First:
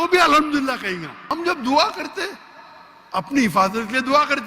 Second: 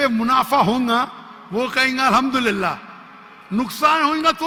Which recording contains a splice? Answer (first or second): first